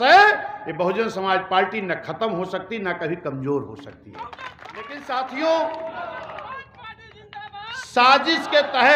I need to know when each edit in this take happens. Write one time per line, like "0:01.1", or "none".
0:05.0